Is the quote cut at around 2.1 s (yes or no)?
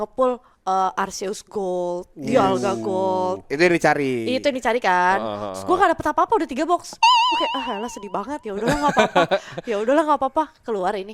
no